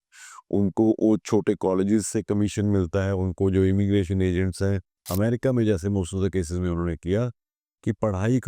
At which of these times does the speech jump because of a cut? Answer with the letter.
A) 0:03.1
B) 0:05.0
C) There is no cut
B